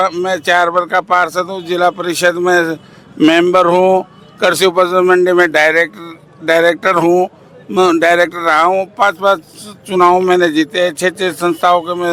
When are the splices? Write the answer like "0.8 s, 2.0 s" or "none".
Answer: none